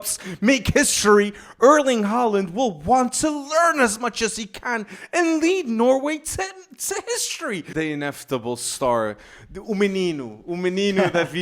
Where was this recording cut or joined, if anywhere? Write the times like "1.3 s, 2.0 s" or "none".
7.7 s